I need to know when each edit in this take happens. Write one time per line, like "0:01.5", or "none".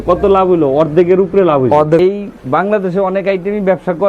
0:02.0